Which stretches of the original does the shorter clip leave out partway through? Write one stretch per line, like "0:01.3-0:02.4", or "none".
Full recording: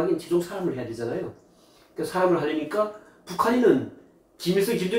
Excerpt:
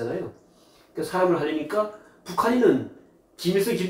none